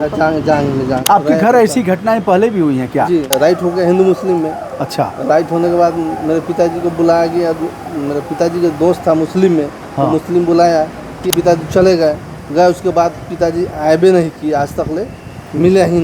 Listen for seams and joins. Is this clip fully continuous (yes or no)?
no